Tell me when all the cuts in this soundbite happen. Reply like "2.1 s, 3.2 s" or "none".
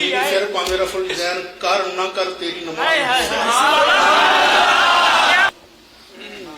5.5 s

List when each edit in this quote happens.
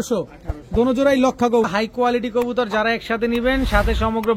1.7 s

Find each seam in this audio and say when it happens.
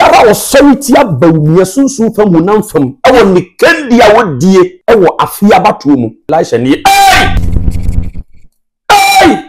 4.8 s, 6.2 s, 7.4 s

